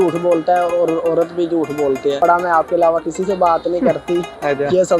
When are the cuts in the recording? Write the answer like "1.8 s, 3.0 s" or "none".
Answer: 2.2 s